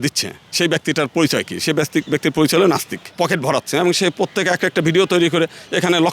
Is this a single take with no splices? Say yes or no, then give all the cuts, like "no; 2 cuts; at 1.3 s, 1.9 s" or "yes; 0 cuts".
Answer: no; 1 cut; at 3.1 s